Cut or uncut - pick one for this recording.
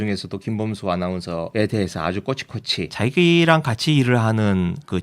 cut